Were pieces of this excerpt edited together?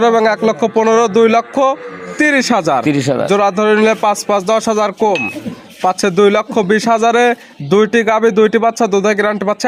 no; 0 cuts

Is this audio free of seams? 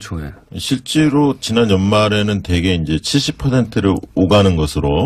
yes; 0 cuts

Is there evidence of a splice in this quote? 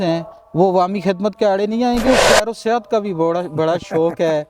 yes; 1 cut; at 2.0 s

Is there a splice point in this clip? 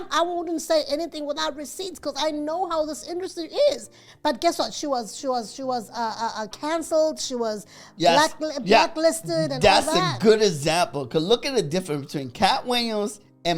no; 0 cuts

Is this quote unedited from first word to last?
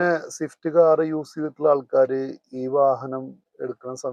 yes; 0 cuts

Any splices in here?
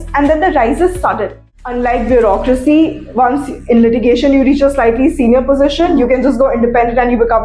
yes; 1 cut; at 1.0 s

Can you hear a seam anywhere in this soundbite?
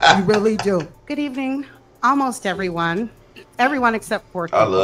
yes; 1 cut; at 1.0 s

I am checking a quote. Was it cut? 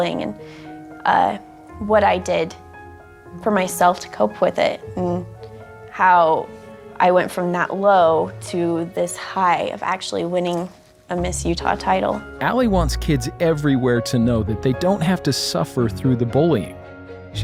no; 0 cuts

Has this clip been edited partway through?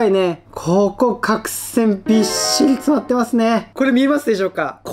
yes; 1 cut; at 3.7 s

